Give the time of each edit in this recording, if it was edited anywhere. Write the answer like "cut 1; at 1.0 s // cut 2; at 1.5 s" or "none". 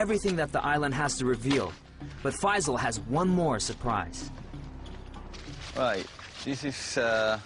none